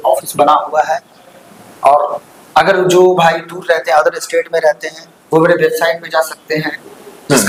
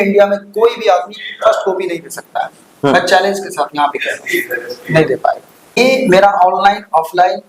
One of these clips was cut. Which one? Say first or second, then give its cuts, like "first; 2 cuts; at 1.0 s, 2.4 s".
second; 1 cut; at 5.5 s